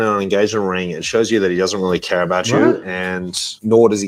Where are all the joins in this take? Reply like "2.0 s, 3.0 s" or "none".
none